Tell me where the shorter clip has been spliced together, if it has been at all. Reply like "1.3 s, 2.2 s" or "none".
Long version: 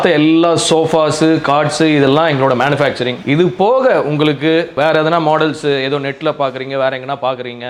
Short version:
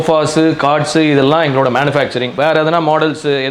2.3 s